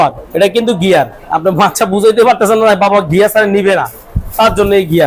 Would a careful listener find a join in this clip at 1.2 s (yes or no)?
yes